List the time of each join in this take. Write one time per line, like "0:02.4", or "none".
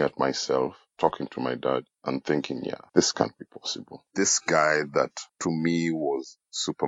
0:02.8
0:04.0
0:05.2